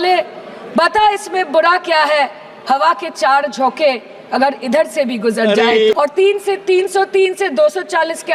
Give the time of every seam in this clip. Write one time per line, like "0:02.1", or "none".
0:05.9